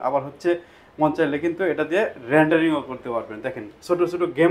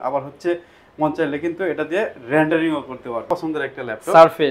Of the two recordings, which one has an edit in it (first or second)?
second